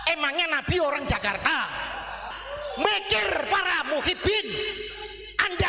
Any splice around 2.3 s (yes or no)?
yes